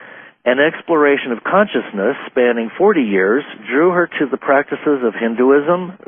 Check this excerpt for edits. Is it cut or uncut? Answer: cut